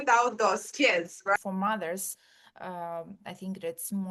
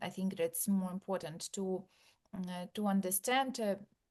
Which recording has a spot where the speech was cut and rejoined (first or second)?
first